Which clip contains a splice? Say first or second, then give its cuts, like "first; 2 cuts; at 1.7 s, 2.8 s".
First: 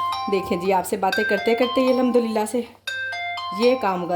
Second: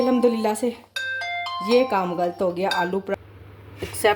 second; 1 cut; at 3.1 s